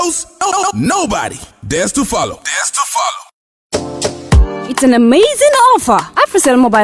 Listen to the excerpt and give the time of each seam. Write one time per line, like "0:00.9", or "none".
0:03.2